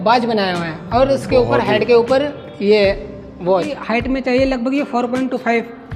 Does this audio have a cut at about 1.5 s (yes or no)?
no